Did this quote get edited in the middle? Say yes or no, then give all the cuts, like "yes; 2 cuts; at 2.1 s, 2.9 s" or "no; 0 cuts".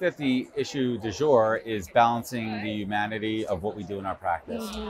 no; 0 cuts